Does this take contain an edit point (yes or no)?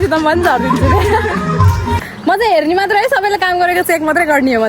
yes